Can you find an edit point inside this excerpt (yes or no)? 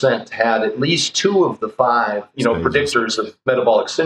yes